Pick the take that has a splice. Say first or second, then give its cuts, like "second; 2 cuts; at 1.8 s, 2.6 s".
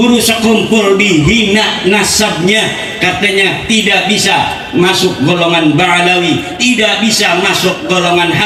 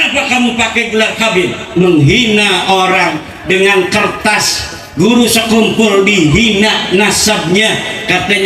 second; 1 cut; at 1.6 s